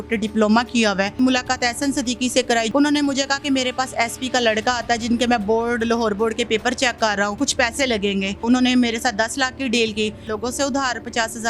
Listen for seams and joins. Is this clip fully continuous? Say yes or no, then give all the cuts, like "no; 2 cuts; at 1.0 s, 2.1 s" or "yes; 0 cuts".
no; 5 cuts; at 1.2 s, 2.7 s, 7.4 s, 8.4 s, 10.3 s